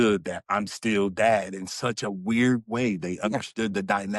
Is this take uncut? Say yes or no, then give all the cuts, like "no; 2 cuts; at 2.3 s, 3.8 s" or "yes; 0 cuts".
yes; 0 cuts